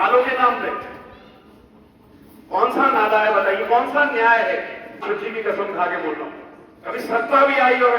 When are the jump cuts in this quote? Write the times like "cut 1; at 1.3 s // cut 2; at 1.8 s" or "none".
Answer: cut 1; at 5.0 s

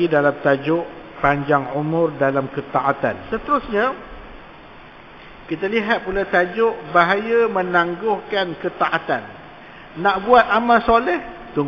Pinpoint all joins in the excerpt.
cut 1; at 3.2 s

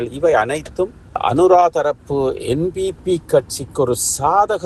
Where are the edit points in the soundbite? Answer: none

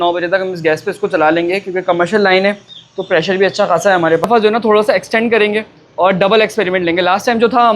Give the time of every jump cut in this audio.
cut 1; at 4.2 s

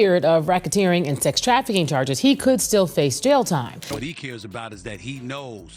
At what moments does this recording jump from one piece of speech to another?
cut 1; at 3.8 s

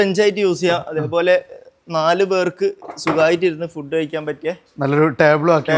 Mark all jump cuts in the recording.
none

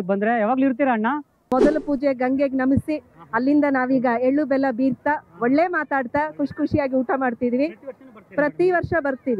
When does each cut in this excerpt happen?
cut 1; at 1.3 s

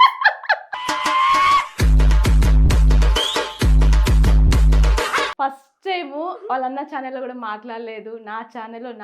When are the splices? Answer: cut 1; at 5.3 s

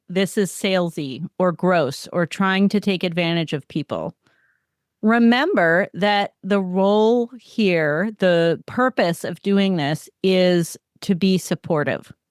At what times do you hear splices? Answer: cut 1; at 8.6 s

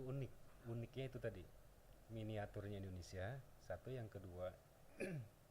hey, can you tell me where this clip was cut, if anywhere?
none

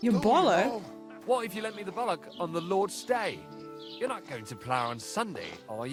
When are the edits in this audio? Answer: none

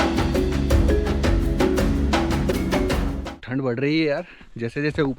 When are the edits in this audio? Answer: cut 1; at 2.5 s

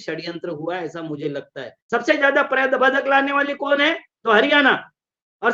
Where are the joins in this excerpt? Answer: cut 1; at 1.8 s

